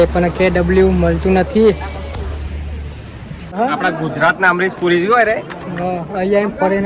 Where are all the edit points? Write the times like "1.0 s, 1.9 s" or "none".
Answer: 3.5 s